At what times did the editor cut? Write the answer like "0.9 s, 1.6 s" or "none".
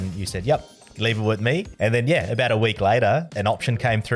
1.7 s, 3.3 s